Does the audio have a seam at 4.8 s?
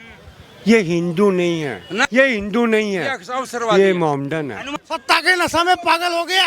yes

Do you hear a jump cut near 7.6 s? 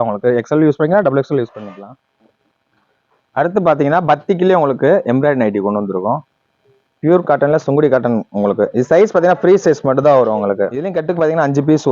no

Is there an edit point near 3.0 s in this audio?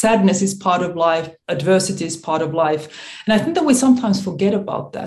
no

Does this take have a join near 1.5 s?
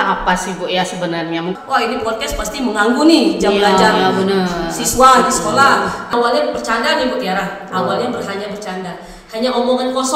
yes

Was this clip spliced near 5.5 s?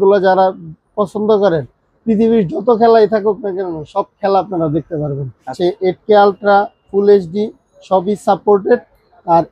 yes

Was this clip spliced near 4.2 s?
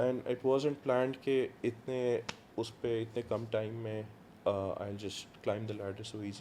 no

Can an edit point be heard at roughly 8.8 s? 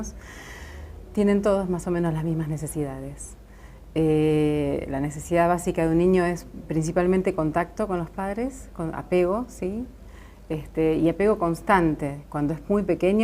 yes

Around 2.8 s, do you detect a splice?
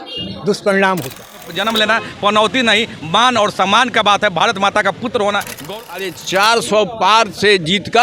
no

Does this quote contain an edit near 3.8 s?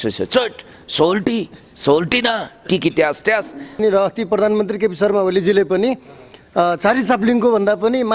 yes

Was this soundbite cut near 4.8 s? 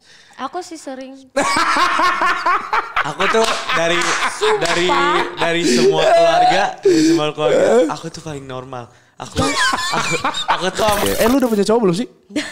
no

